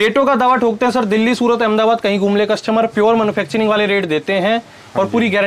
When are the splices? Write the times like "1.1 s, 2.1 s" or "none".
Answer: none